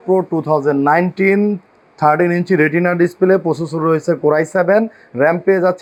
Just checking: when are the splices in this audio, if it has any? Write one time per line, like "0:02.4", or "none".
none